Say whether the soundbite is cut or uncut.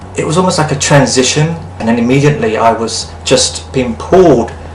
cut